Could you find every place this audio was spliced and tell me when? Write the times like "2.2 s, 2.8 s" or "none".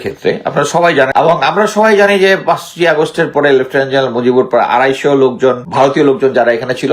1.1 s, 5.6 s